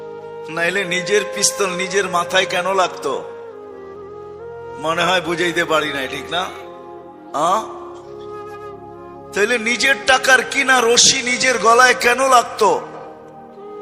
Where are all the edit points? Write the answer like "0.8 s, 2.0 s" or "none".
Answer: none

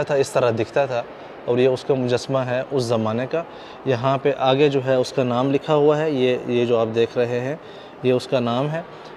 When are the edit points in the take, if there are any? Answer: none

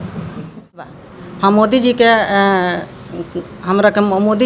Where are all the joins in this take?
0.9 s

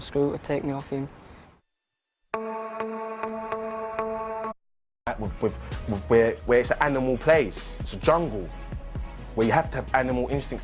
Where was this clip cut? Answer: none

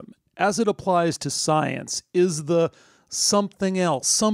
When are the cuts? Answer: none

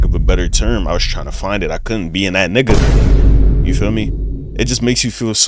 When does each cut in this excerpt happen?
none

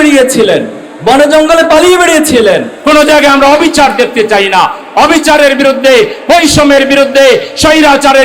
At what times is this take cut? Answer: 2.7 s

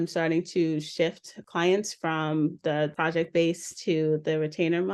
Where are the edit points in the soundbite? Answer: 1.4 s, 3.0 s

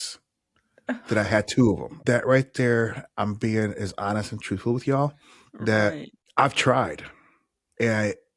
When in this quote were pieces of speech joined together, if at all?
1.9 s, 6.1 s

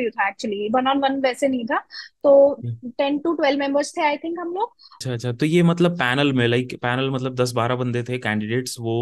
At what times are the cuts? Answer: 4.9 s

